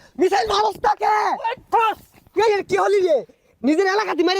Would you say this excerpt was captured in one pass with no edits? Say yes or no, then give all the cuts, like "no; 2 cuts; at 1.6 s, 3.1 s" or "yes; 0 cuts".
yes; 0 cuts